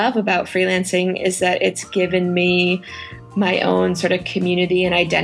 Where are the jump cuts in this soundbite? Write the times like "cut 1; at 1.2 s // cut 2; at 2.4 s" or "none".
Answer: none